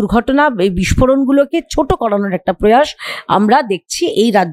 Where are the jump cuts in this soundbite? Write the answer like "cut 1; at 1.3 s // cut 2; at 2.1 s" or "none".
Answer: none